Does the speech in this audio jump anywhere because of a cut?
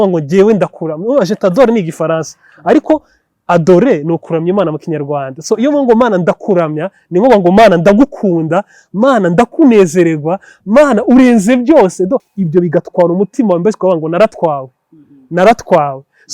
yes; 1 cut; at 12.3 s

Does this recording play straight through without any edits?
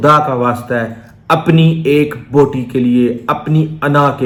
yes; 0 cuts

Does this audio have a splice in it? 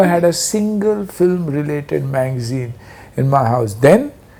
no; 0 cuts

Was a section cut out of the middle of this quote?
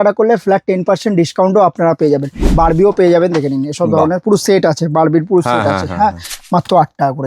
yes; 2 cuts; at 2.4 s, 6.3 s

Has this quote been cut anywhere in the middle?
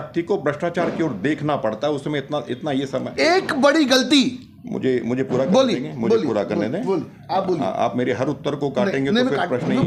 no; 0 cuts

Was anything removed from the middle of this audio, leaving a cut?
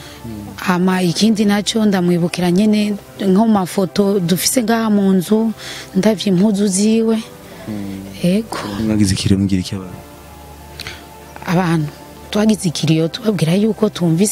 yes; 1 cut; at 8.8 s

